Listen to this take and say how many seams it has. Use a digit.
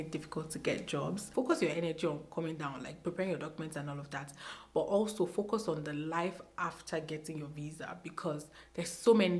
1